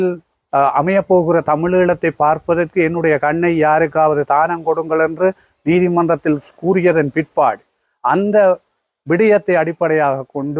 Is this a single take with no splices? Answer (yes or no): yes